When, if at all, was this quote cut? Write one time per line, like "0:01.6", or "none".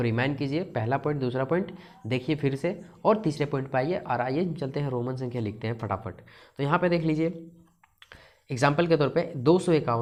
none